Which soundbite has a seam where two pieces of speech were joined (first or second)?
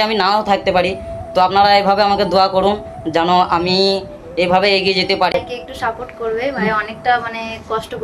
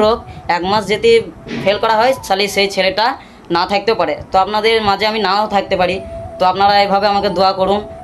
first